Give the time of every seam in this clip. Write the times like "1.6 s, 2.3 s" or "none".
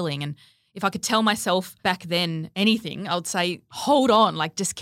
1.9 s, 3.7 s